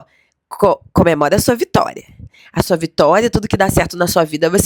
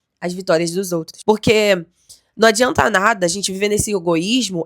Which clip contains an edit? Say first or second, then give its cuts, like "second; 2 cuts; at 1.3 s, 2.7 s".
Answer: second; 1 cut; at 1.1 s